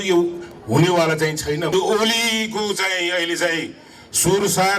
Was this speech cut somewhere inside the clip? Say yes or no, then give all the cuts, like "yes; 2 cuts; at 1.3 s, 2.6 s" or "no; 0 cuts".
yes; 1 cut; at 1.7 s